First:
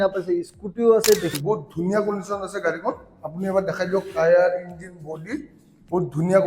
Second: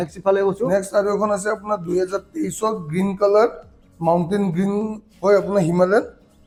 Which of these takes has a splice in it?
first; 1 cut; at 1.3 s

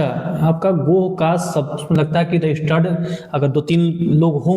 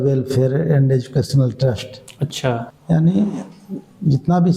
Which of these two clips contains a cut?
second; 1 cut; at 2.7 s

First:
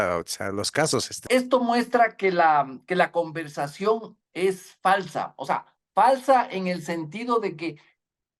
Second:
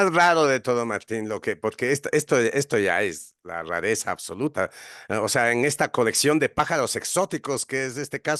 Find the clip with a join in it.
first; 1 cut; at 1.2 s

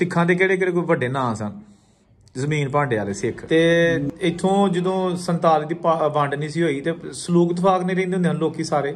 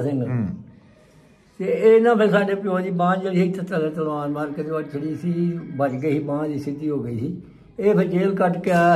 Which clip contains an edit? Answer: first; 1 cut; at 3.4 s

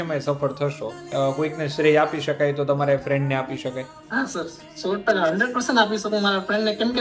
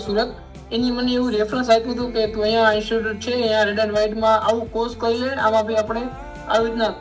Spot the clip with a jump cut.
first; 2 cuts; at 1.1 s, 4.0 s

